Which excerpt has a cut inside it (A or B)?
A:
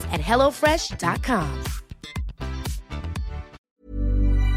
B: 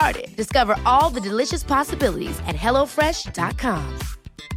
A